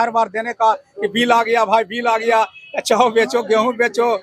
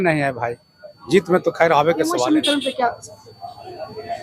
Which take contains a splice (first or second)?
second